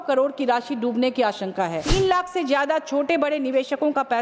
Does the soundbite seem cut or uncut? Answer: cut